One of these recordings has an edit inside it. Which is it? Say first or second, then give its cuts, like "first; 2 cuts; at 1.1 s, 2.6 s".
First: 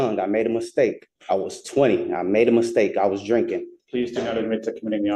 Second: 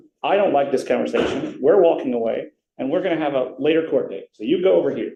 first; 2 cuts; at 1.1 s, 3.7 s